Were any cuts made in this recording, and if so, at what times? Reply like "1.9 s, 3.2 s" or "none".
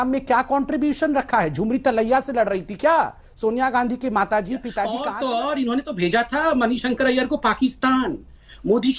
5.0 s